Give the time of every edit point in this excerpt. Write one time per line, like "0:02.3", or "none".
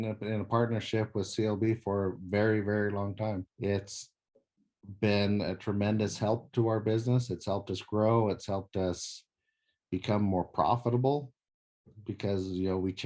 0:03.5